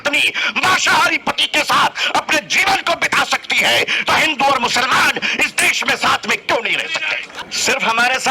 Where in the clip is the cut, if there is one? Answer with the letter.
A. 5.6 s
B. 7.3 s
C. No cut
B